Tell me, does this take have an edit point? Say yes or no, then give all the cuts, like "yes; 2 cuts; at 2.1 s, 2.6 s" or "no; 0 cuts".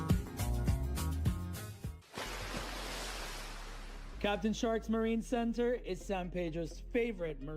yes; 1 cut; at 1.9 s